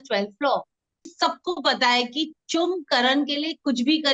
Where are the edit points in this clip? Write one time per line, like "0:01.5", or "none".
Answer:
0:01.1